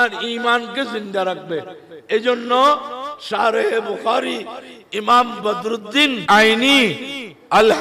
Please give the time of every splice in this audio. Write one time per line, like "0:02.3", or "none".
0:06.2